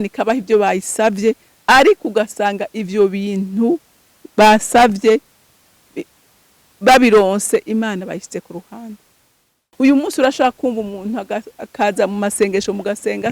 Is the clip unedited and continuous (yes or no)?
no